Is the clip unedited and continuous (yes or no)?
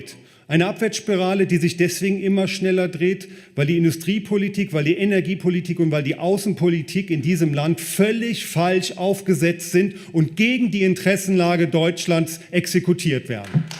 yes